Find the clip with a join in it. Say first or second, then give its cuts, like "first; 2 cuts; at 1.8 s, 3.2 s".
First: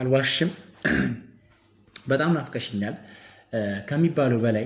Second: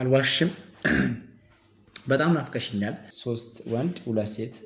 second; 1 cut; at 3.1 s